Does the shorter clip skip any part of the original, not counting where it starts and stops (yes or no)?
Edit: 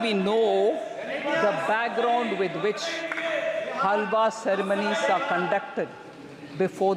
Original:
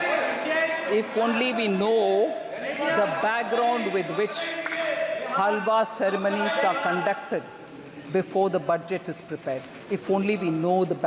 no